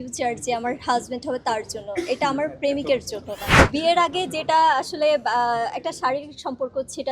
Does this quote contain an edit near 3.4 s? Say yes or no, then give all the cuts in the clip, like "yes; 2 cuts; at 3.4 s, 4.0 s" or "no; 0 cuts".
yes; 1 cut; at 3.4 s